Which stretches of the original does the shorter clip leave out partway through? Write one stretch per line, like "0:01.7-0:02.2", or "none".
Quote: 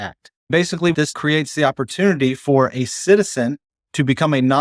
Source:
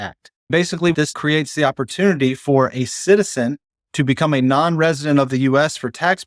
none